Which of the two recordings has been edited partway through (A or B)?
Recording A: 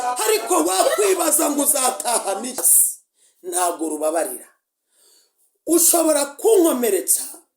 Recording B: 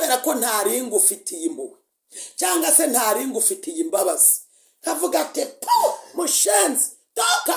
A